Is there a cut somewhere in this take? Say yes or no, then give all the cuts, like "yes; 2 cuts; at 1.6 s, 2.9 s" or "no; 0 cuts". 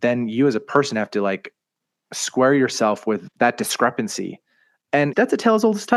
no; 0 cuts